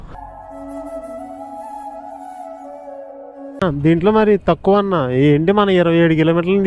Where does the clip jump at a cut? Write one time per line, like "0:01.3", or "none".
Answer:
none